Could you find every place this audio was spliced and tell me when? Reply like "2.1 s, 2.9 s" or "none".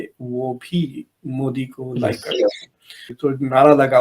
3.0 s